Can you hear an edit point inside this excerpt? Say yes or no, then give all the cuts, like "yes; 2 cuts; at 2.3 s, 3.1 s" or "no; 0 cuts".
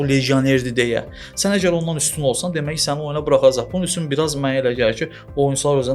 no; 0 cuts